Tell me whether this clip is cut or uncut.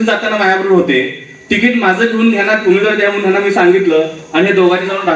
uncut